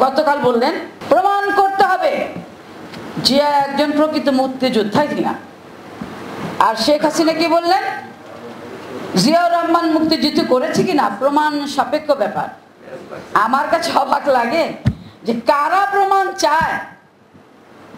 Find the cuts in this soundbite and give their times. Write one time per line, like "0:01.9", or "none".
0:00.9